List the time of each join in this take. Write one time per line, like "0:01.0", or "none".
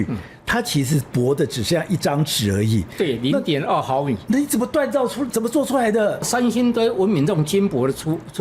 0:06.2

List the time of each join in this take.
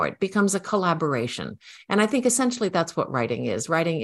none

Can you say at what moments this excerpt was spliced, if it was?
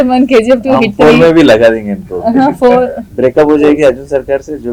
none

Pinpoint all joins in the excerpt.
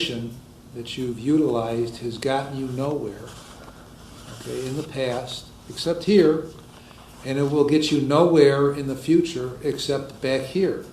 none

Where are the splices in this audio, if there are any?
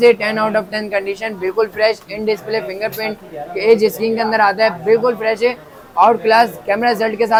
none

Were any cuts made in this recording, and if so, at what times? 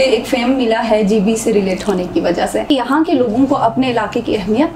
0:02.7

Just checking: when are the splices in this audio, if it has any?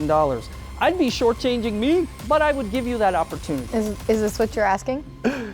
0:02.2
0:03.7

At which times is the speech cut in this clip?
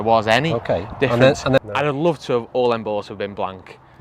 0:01.6

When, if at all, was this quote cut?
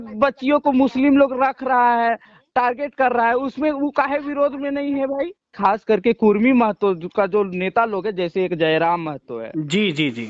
0:05.5

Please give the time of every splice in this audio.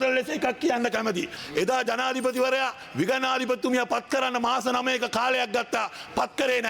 0:01.4

